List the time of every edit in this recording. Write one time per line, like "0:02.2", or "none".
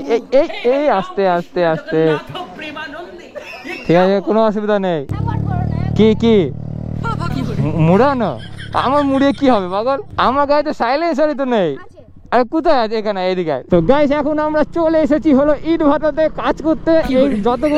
0:05.1
0:13.6

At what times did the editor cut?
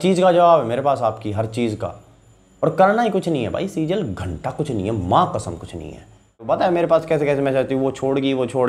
0:06.5

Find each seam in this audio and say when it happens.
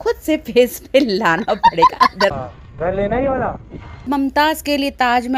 0:02.3
0:04.1

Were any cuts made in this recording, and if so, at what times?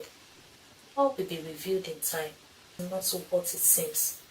0:02.7

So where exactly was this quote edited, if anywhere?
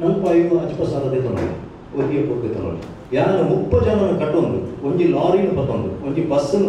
0:02.9

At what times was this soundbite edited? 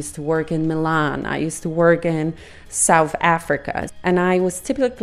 0:03.8

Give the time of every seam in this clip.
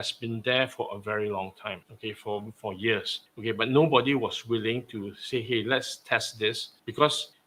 none

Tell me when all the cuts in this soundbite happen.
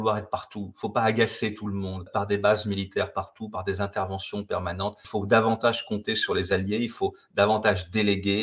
0:02.1

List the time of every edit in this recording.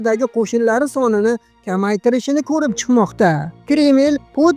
0:03.5

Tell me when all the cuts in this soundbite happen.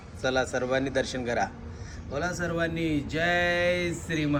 none

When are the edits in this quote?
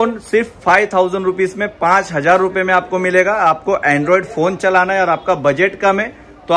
none

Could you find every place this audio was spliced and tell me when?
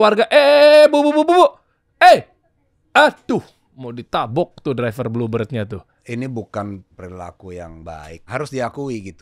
0:05.9
0:06.9
0:08.3

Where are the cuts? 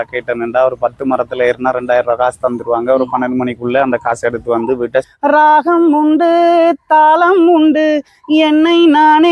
0:05.1

